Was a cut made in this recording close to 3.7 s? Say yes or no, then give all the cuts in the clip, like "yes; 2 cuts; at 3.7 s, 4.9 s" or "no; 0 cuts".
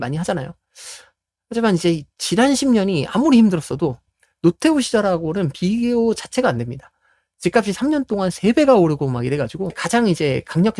no; 1 cut; at 9.8 s